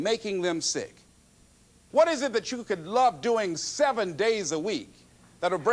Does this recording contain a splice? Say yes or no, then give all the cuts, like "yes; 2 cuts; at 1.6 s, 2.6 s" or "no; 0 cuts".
yes; 1 cut; at 1.3 s